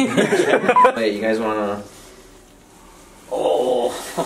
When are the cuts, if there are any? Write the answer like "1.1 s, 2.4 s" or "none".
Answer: 1.0 s